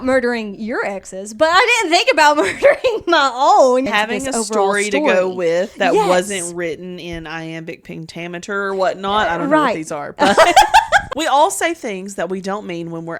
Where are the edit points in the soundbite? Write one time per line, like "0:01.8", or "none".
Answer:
0:03.9
0:11.1